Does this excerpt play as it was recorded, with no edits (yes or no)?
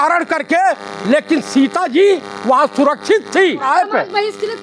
no